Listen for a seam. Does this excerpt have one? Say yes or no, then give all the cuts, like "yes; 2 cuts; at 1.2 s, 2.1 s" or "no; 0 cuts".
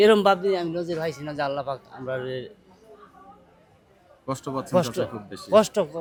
no; 0 cuts